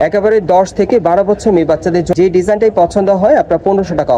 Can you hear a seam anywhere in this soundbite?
yes; 1 cut; at 2.1 s

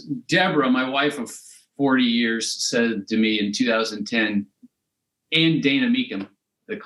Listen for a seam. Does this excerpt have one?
no; 0 cuts

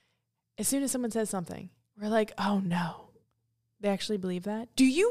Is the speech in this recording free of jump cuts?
yes; 0 cuts

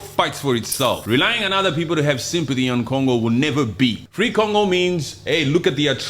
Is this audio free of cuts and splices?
no; 2 cuts; at 1.0 s, 4.0 s

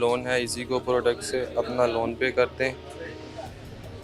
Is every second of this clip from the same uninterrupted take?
yes; 0 cuts

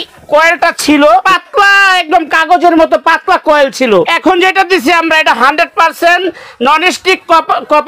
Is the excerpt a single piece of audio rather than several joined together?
no; 2 cuts; at 1.2 s, 4.1 s

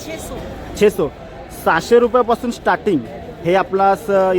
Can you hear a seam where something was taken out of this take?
no; 0 cuts

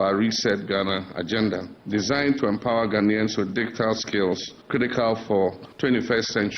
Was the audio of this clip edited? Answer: yes; 3 cuts; at 1.7 s, 4.5 s, 5.7 s

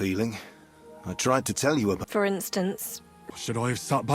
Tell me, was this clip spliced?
yes; 2 cuts; at 2.0 s, 3.2 s

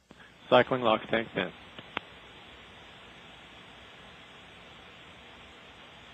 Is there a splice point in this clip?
no; 0 cuts

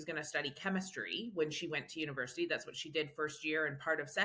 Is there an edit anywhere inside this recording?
no; 0 cuts

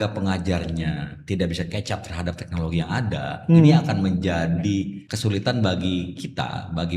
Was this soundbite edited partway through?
yes; 1 cut; at 5.0 s

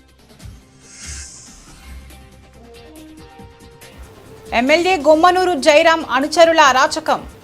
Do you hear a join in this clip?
no; 0 cuts

